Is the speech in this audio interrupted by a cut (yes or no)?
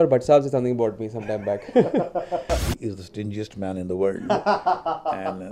yes